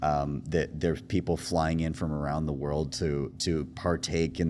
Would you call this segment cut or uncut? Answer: uncut